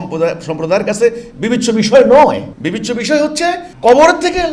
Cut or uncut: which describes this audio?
cut